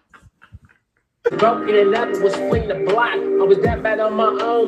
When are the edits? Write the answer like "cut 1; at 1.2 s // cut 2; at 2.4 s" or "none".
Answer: cut 1; at 1.4 s